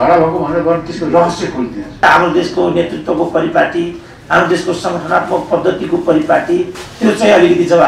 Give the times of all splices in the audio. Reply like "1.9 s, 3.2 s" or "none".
2.0 s

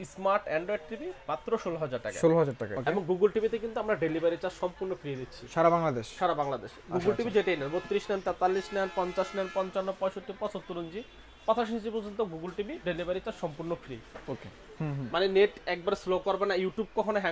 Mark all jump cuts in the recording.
2.7 s, 14.6 s

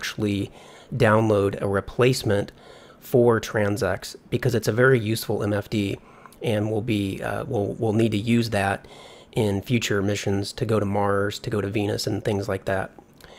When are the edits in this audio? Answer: none

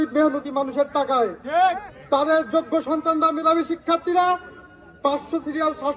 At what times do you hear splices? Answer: none

